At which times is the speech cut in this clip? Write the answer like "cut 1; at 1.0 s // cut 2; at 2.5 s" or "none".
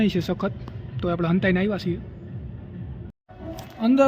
cut 1; at 3.1 s

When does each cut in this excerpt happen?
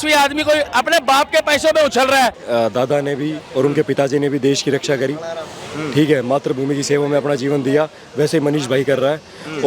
cut 1; at 2.3 s

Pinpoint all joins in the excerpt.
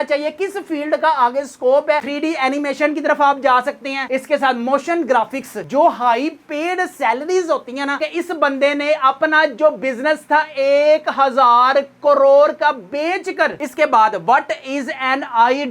cut 1; at 2.0 s // cut 2; at 4.0 s // cut 3; at 8.0 s // cut 4; at 13.6 s

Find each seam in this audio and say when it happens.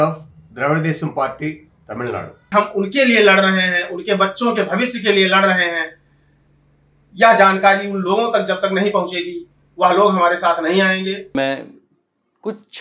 cut 1; at 2.4 s // cut 2; at 11.3 s

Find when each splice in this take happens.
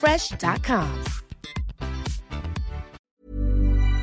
cut 1; at 3.0 s

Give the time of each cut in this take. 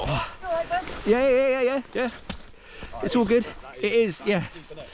none

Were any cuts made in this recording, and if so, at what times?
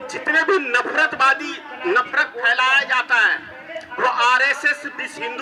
none

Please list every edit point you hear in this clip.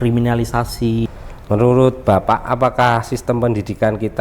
cut 1; at 1.1 s

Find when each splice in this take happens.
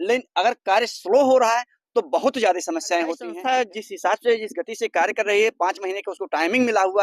cut 1; at 3.3 s

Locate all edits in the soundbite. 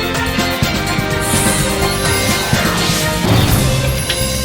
none

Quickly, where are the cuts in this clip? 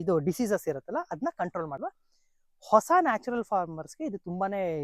cut 1; at 1.8 s

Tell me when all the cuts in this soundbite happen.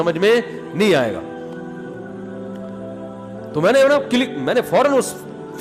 none

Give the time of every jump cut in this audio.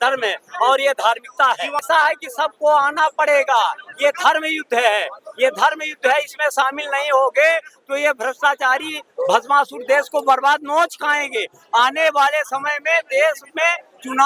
cut 1; at 1.8 s

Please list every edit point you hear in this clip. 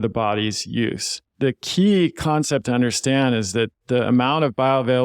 cut 1; at 1.3 s

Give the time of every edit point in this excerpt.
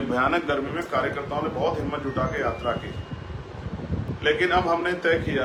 none

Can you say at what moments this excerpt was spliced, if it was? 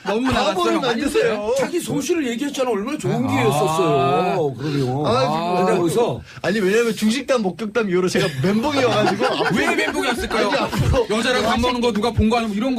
none

